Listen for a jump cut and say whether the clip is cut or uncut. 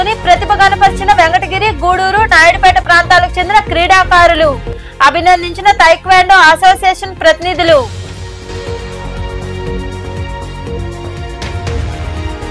uncut